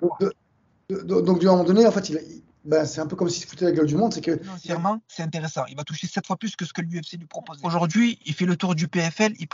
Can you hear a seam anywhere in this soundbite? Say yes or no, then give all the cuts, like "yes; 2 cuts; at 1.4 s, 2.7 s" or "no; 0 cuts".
yes; 2 cuts; at 4.5 s, 7.6 s